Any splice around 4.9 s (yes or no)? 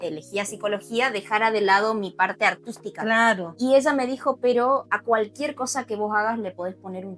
yes